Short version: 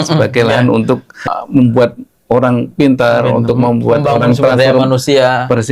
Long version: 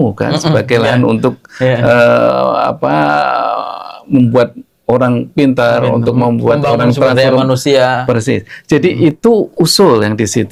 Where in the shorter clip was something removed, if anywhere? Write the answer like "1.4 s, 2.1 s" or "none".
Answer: 1.1 s